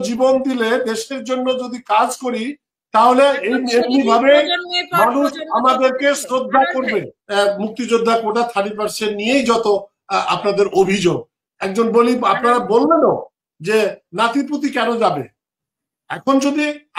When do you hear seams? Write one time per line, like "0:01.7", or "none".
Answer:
0:07.2